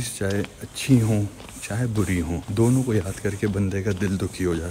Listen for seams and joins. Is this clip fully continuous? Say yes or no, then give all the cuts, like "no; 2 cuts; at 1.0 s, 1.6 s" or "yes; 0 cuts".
no; 1 cut; at 2.5 s